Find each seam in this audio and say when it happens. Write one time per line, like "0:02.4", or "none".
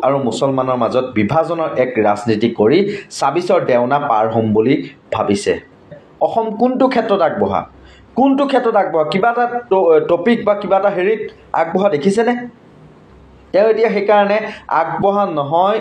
0:06.0